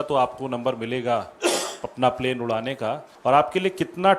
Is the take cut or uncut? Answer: cut